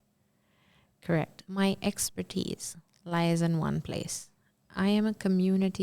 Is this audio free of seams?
no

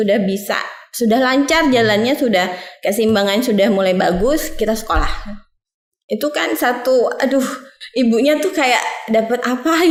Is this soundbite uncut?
yes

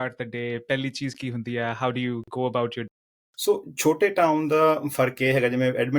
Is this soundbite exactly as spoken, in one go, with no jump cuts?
no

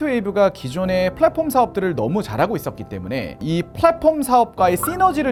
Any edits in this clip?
no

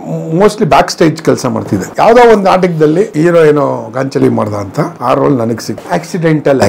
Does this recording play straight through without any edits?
no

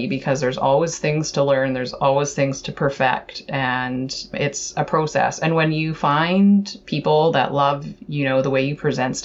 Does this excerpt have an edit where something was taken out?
no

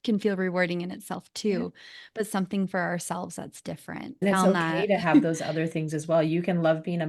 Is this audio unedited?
no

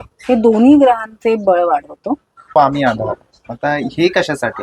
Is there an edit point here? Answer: yes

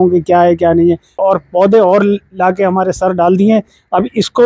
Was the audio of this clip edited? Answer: yes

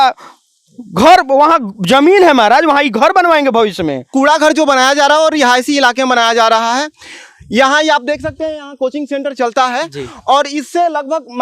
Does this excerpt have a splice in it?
yes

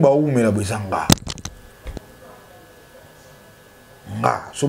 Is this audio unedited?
yes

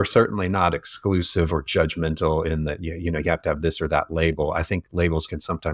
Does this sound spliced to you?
no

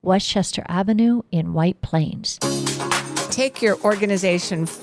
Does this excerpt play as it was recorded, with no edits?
no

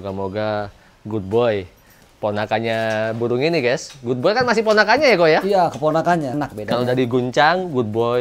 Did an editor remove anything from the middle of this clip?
yes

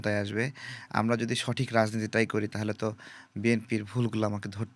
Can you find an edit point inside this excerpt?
no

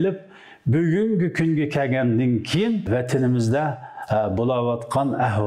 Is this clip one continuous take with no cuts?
no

